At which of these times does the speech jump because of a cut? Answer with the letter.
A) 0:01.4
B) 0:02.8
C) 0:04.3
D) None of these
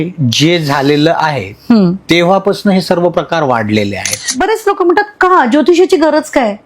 C